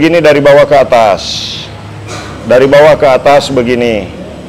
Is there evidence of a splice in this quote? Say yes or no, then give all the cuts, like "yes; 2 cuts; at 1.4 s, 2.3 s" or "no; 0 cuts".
no; 0 cuts